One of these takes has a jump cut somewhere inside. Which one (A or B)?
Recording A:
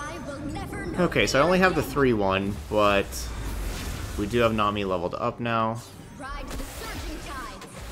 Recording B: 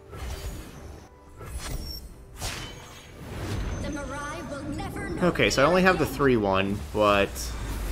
B